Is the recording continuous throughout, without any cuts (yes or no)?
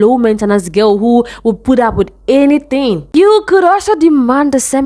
no